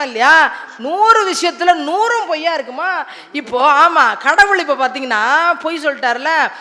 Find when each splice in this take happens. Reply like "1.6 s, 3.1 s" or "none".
none